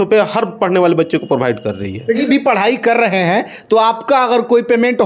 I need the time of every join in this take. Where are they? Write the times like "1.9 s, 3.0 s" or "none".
2.2 s

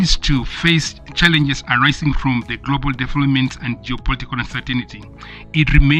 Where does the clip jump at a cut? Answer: none

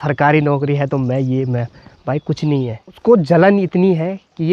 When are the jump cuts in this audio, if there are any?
2.9 s

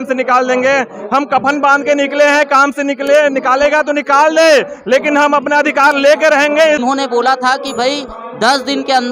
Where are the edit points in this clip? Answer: 6.8 s

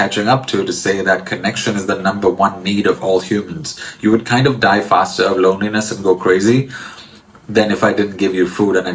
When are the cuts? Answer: none

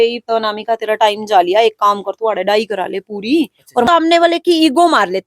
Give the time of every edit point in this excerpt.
3.9 s

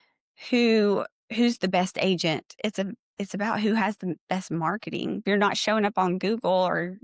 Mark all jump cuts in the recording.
2.5 s, 5.2 s

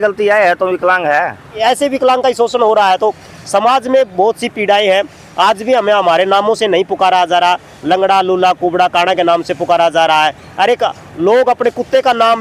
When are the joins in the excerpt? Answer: 1.5 s

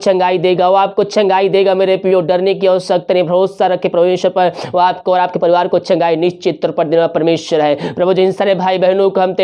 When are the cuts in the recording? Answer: none

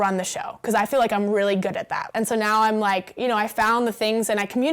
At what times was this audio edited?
2.0 s

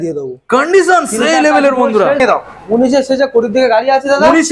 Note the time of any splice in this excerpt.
2.2 s

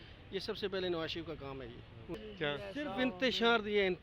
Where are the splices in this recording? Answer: 2.1 s

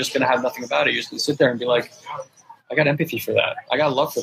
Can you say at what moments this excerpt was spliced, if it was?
none

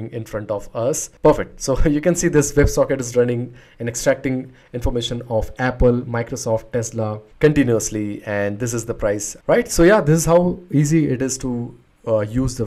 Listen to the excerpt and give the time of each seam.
9.3 s

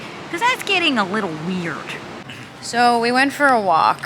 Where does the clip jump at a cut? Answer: 2.2 s

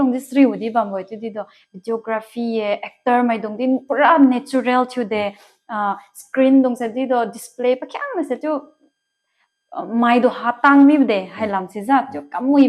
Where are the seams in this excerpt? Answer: none

